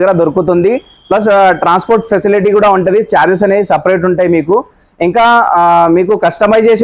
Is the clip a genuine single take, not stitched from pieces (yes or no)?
yes